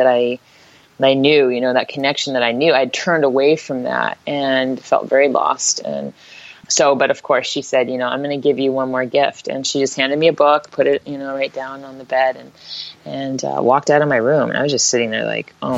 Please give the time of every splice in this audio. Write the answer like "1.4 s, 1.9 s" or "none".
6.6 s